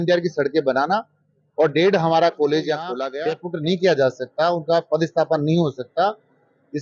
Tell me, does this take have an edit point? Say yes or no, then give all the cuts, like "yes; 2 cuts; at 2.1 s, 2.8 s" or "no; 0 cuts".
yes; 1 cut; at 3.0 s